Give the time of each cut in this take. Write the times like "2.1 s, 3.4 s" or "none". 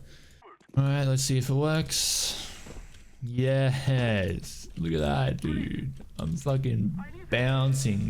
7.1 s